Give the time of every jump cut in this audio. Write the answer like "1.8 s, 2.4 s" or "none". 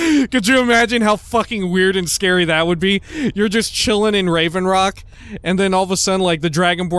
none